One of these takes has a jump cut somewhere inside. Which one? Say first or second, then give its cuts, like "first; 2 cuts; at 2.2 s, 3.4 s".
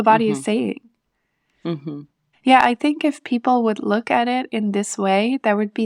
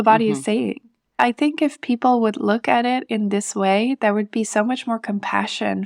second; 1 cut; at 1.2 s